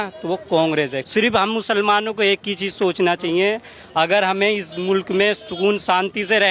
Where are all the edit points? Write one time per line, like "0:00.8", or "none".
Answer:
0:01.0